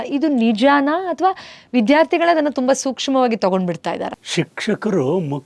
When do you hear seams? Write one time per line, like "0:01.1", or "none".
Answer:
0:04.1